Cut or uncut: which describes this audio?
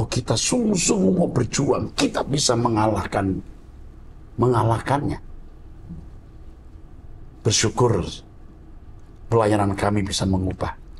uncut